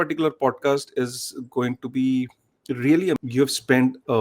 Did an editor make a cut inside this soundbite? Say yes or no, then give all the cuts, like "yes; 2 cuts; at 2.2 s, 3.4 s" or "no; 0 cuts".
yes; 1 cut; at 3.2 s